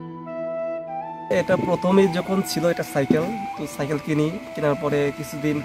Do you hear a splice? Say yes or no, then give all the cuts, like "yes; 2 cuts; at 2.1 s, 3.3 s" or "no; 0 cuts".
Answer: yes; 1 cut; at 1.3 s